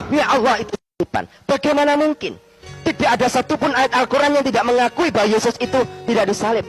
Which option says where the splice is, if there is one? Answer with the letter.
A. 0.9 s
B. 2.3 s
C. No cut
A